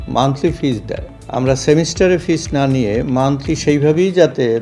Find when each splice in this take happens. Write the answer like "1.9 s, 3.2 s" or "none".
1.1 s